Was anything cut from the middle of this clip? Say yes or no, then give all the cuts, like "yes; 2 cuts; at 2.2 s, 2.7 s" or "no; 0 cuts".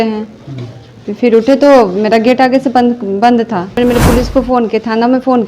yes; 1 cut; at 3.7 s